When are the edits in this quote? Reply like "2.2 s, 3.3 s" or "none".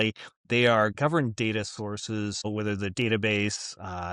0.9 s, 2.5 s